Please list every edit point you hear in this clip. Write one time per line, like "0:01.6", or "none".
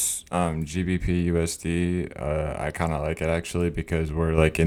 none